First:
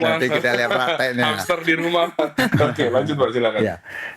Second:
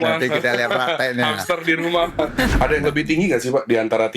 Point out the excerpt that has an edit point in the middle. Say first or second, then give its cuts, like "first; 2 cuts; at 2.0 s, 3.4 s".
second; 1 cut; at 2.5 s